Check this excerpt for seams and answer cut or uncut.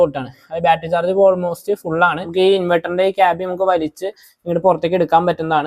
cut